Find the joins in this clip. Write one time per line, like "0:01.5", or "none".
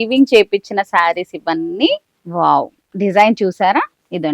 none